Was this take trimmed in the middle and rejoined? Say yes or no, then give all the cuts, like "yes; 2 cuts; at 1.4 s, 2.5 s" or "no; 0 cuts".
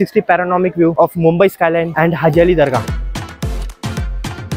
yes; 3 cuts; at 0.9 s, 1.9 s, 2.8 s